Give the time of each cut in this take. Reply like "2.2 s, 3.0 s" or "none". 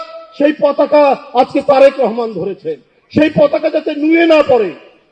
none